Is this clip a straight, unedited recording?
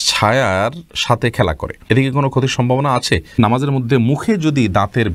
no; 2 cuts; at 1.7 s, 3.4 s

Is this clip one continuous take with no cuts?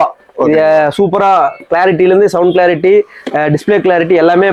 yes; 0 cuts

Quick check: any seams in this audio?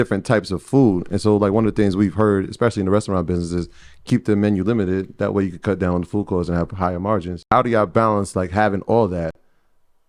yes; 1 cut; at 7.5 s

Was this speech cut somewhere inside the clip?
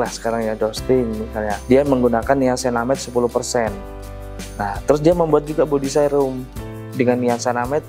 no; 0 cuts

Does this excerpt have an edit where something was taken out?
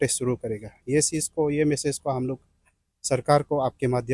no; 0 cuts

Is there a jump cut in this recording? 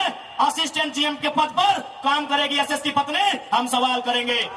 no; 0 cuts

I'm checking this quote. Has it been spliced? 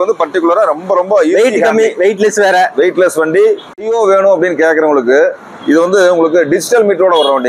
yes; 1 cut; at 3.7 s

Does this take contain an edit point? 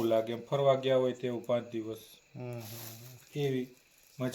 no; 0 cuts

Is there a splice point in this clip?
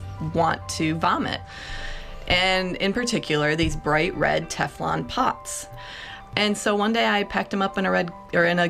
yes; 2 cuts; at 1.6 s, 5.7 s

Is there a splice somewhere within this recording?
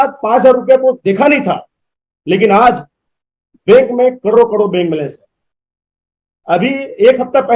no; 0 cuts

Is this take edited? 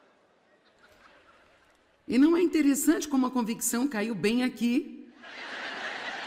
no; 0 cuts

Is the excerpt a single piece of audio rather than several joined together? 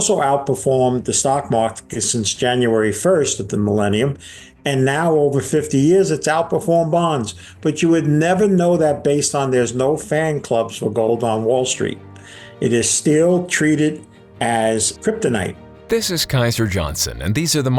no; 2 cuts; at 14.9 s, 15.7 s

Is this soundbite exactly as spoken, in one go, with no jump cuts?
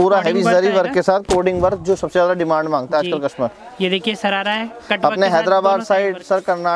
yes; 0 cuts

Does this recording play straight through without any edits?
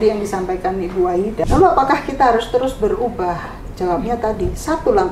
no; 1 cut; at 1.4 s

